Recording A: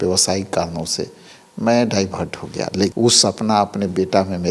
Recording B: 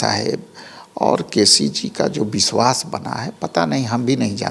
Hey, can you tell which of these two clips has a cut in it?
A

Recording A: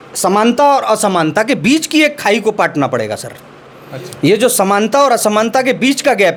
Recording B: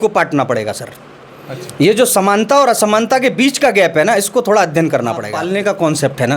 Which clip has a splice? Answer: B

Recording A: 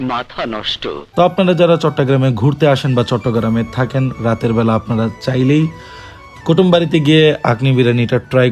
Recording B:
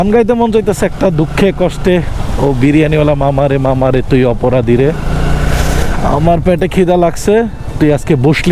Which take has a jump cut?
A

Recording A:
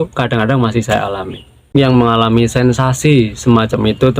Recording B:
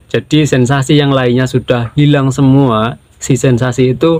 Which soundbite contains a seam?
A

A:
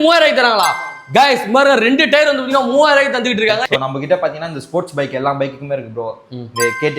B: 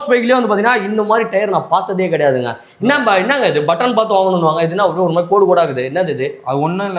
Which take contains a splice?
A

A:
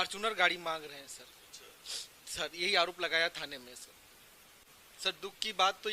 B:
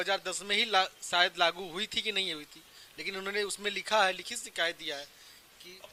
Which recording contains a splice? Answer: A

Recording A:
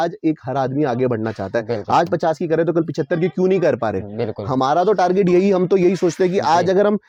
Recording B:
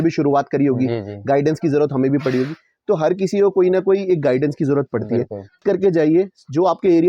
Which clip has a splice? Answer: B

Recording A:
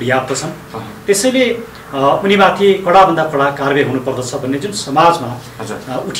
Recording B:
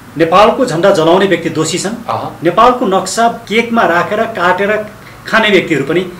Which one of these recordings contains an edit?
B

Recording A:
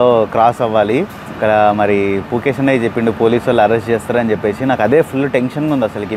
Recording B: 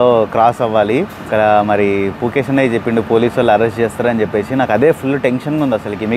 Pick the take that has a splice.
B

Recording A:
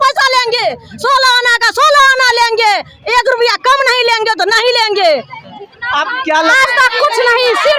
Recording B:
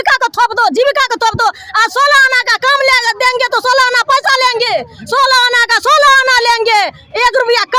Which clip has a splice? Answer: A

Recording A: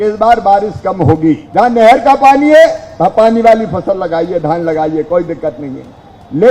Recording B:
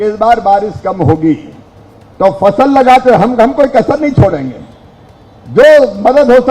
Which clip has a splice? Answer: A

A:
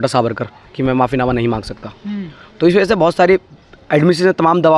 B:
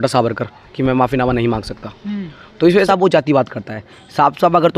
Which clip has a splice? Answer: B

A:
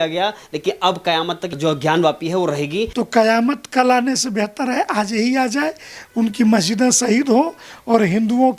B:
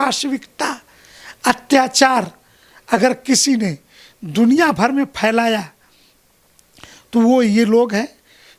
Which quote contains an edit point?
A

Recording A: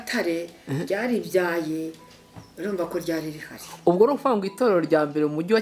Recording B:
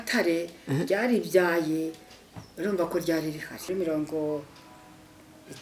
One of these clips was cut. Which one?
B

